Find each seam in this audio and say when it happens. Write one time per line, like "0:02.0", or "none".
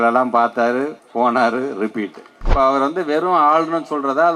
0:01.0
0:02.4